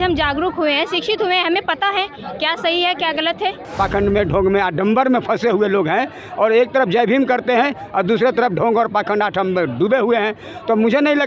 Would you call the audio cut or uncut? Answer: cut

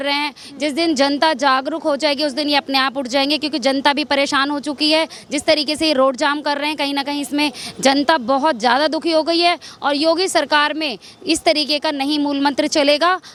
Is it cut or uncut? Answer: uncut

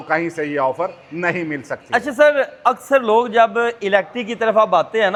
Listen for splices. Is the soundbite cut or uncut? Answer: uncut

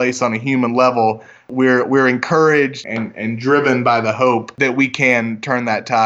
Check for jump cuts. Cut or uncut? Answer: cut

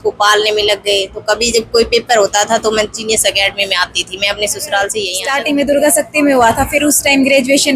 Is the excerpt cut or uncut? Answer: cut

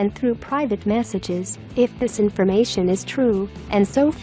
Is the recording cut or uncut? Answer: uncut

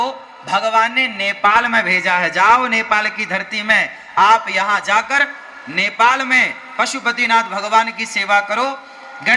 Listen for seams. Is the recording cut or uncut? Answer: uncut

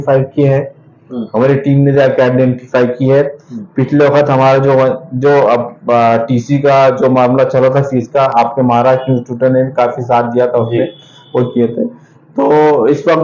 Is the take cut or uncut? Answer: uncut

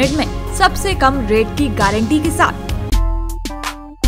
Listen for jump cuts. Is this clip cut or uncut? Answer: cut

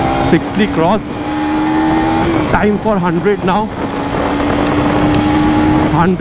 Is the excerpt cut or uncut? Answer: uncut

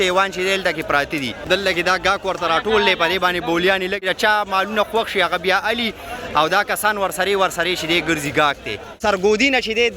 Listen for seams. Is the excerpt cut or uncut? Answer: cut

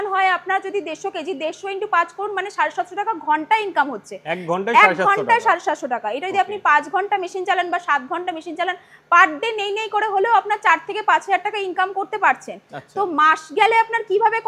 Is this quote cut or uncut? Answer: uncut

